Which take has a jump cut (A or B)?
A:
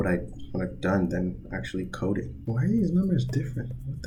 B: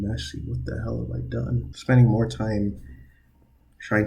B